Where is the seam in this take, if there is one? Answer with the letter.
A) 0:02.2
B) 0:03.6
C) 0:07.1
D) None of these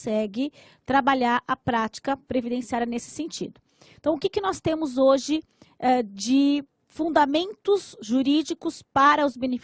C